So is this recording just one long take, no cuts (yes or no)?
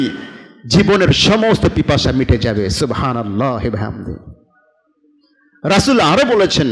yes